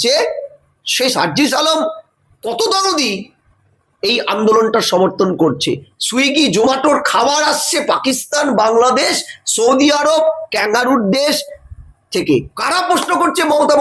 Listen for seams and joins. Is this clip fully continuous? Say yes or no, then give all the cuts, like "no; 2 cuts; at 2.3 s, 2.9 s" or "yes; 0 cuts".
no; 1 cut; at 12.5 s